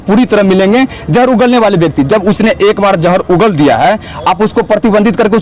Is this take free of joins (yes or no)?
yes